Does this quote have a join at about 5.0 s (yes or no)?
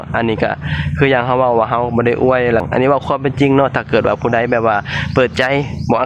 no